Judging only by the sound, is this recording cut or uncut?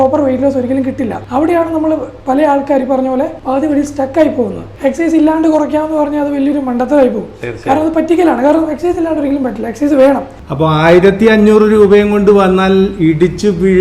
cut